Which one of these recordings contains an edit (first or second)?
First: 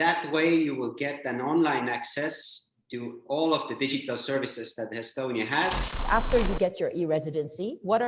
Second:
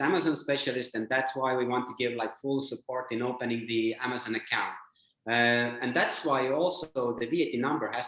first